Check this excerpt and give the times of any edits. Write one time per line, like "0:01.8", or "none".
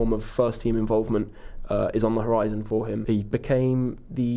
0:03.3